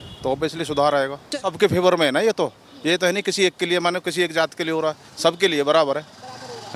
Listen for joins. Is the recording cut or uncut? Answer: cut